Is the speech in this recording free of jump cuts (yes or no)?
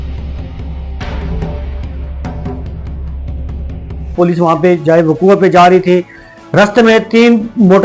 no